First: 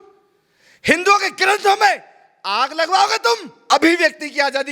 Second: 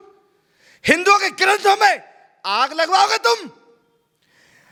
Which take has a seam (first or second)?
first